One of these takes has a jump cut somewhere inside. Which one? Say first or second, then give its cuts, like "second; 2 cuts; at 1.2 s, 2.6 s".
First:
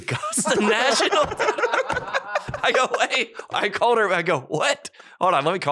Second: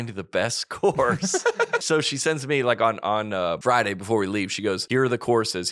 second; 3 cuts; at 1.8 s, 3.6 s, 4.8 s